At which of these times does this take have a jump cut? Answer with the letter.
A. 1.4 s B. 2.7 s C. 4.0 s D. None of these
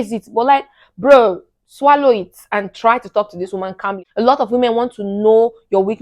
C